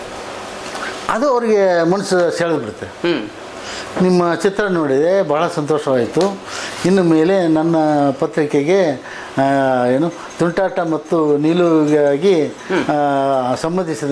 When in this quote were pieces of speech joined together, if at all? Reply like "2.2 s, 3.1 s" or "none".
none